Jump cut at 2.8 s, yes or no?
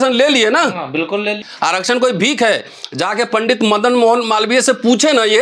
no